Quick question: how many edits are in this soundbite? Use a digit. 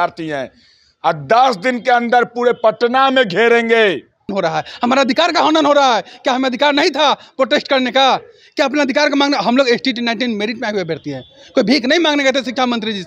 1